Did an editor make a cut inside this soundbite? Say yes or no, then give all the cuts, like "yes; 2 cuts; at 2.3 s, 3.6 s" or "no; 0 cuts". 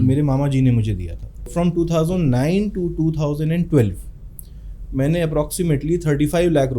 yes; 1 cut; at 1.5 s